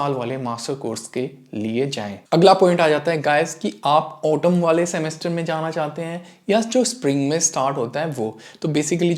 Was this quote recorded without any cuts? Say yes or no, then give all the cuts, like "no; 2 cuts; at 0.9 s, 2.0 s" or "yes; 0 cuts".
yes; 0 cuts